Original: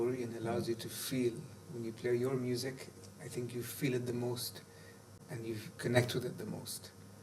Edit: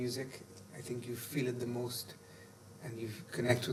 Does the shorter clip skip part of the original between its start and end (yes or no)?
no